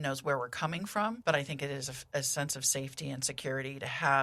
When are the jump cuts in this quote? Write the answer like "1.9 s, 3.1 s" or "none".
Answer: 1.2 s